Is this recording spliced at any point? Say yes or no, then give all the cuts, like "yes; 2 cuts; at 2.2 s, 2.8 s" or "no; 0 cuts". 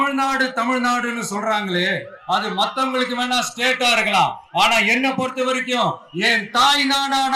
no; 0 cuts